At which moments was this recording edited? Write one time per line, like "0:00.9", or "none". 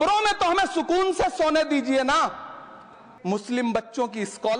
0:03.1